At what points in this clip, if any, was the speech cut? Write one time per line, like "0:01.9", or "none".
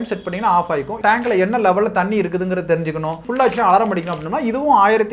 0:01.0
0:03.2